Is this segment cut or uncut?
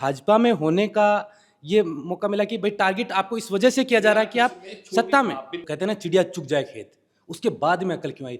cut